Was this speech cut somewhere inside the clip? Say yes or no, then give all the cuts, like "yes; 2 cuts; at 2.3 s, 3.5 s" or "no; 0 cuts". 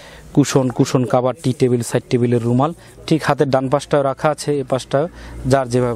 no; 0 cuts